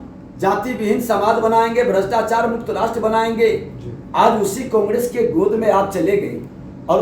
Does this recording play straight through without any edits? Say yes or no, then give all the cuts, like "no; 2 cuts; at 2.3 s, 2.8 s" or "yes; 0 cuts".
yes; 0 cuts